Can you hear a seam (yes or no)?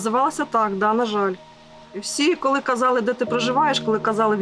no